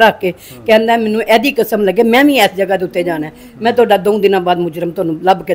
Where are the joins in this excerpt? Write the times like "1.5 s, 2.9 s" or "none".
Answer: none